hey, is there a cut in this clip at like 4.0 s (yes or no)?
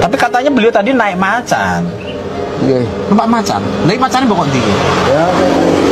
no